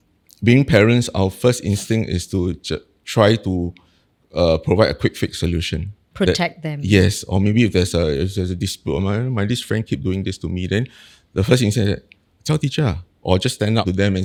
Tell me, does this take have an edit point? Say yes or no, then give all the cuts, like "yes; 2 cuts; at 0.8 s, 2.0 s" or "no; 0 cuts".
no; 0 cuts